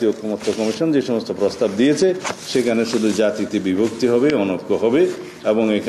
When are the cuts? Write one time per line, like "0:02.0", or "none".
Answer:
none